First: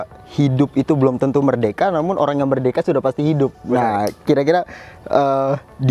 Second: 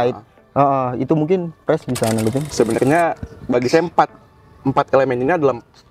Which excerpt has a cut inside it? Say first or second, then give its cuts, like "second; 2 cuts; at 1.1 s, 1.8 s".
second; 1 cut; at 2.5 s